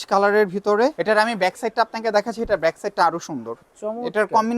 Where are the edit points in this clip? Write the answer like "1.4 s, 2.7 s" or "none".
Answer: 1.0 s, 3.7 s